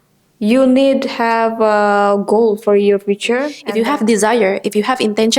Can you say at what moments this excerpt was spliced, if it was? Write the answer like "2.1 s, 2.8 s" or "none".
3.6 s